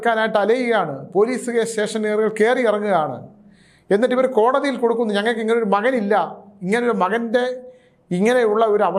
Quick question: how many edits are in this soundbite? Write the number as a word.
zero